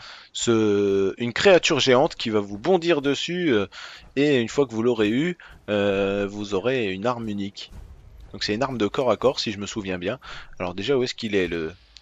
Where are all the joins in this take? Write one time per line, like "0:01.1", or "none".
none

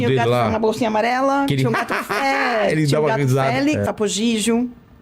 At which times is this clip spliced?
0:03.9

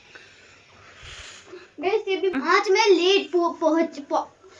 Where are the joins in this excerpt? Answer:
0:02.4

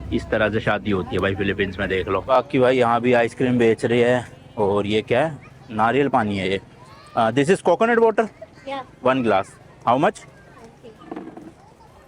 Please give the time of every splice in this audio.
none

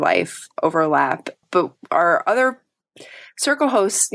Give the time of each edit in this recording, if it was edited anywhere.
0:01.4

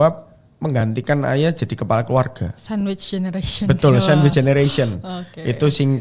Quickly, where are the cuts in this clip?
none

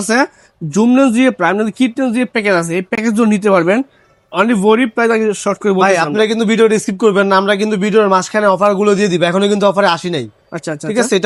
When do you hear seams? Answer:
none

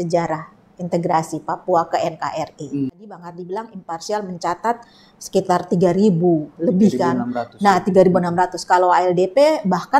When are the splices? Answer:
0:03.3

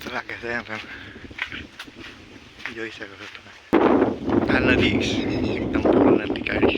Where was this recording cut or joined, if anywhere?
0:03.7

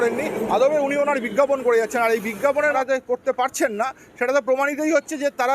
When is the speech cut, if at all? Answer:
0:02.7

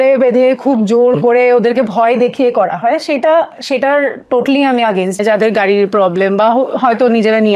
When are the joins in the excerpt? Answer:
0:05.2

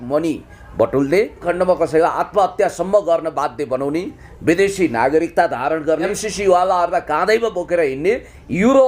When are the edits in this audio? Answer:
0:01.5
0:06.2

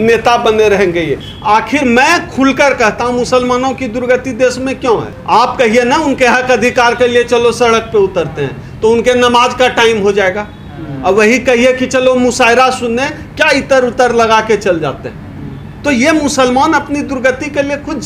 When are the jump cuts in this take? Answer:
0:01.3

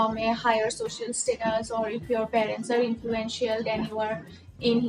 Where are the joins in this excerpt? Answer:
none

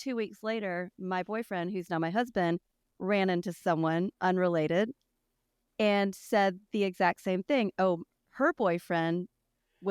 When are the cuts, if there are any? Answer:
none

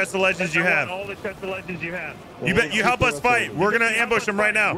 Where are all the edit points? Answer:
0:02.2

